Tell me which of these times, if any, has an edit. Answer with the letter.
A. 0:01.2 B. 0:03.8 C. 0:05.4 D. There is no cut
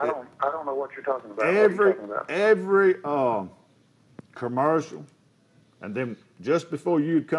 D